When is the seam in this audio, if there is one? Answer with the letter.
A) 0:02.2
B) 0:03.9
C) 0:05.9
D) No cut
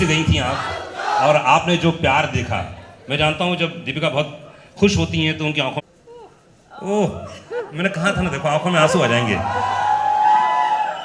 D